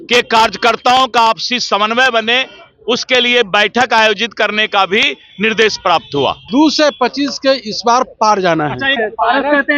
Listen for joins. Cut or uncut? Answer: cut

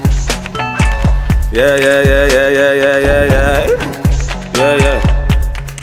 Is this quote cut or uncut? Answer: uncut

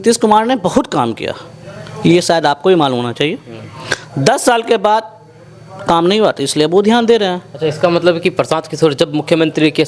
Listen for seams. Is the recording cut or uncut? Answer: uncut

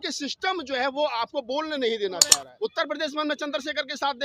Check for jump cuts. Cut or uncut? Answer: cut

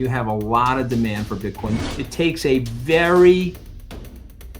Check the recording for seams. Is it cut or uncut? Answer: cut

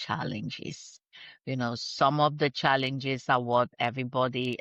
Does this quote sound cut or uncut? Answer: uncut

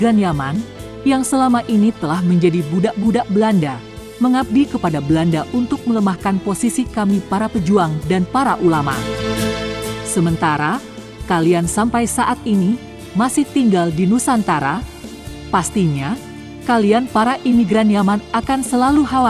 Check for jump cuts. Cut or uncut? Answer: uncut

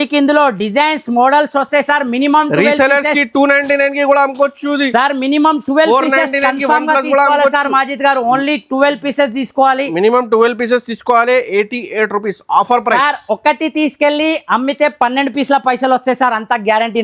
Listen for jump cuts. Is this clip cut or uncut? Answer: uncut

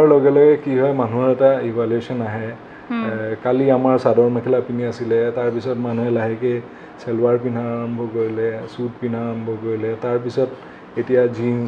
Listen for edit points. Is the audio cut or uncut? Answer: uncut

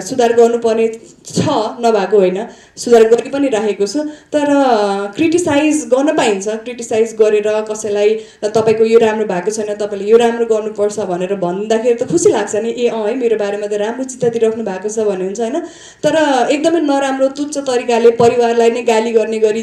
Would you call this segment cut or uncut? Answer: uncut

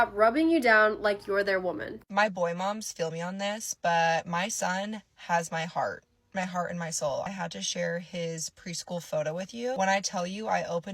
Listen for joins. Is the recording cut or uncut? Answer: cut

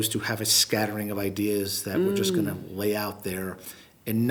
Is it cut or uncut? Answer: uncut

